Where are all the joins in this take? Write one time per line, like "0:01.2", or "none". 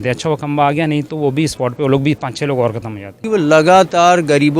0:03.2